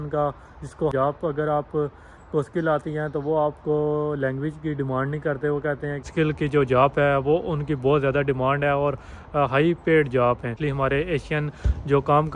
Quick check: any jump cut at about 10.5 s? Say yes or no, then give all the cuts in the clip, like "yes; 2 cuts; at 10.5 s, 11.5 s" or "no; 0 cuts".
yes; 3 cuts; at 0.9 s, 6.1 s, 10.5 s